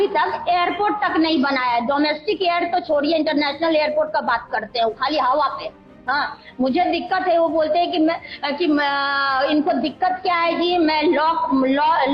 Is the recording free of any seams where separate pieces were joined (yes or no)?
yes